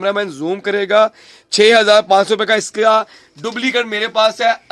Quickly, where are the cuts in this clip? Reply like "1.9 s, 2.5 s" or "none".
none